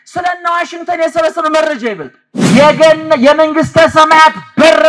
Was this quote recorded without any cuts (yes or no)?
no